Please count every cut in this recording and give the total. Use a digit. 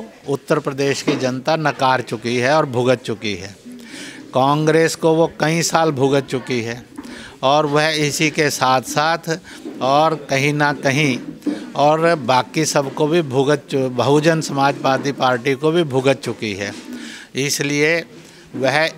0